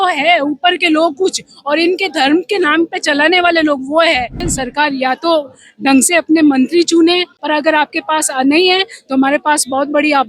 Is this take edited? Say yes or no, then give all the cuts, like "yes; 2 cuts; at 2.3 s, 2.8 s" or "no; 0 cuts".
yes; 2 cuts; at 4.5 s, 7.3 s